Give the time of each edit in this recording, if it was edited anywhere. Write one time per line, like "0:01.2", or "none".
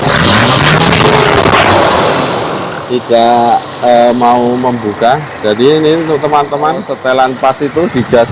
0:06.9